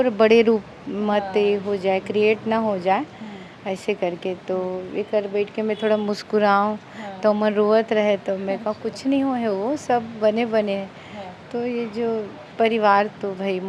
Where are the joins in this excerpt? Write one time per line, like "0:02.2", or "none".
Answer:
none